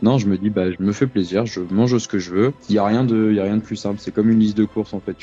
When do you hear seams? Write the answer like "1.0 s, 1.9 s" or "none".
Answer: 2.6 s